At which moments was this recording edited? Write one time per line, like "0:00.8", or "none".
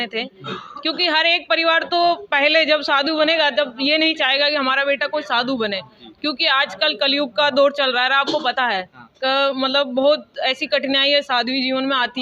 none